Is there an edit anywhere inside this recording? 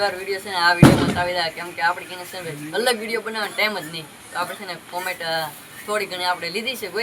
no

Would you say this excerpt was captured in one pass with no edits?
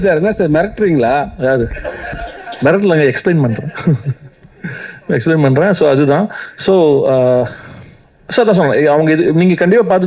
yes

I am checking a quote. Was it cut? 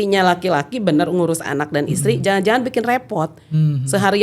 no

